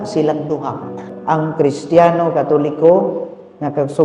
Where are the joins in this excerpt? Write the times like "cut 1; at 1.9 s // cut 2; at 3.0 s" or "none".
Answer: cut 1; at 1.0 s